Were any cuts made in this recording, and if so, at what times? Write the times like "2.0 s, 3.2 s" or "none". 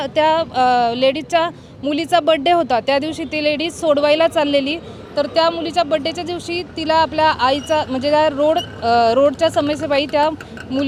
none